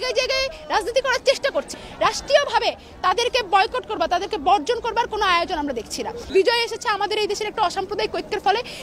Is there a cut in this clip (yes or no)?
yes